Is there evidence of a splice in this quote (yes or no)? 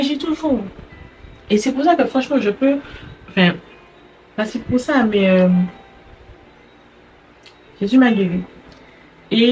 no